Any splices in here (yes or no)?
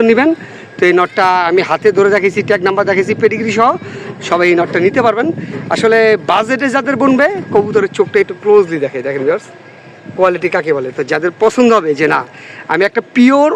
no